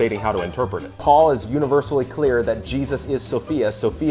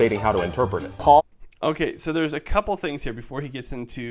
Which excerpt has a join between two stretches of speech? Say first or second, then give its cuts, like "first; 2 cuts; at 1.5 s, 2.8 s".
first; 1 cut; at 1.3 s